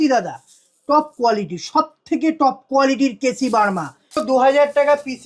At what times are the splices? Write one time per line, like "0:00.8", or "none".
0:04.2